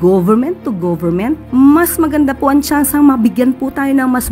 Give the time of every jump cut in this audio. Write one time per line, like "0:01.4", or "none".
0:01.4